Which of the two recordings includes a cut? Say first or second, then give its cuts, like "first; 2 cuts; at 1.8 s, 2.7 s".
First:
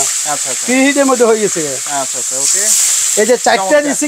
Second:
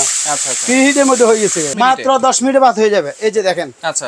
second; 1 cut; at 1.7 s